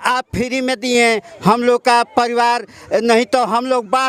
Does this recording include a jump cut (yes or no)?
no